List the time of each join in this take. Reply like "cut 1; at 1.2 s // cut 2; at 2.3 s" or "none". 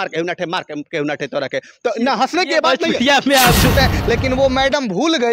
cut 1; at 3.7 s